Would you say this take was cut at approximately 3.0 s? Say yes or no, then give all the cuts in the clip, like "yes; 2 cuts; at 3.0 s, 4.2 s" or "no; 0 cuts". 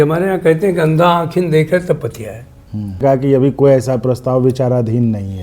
yes; 1 cut; at 3.0 s